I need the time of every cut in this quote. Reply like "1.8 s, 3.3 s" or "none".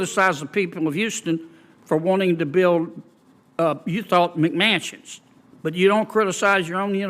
none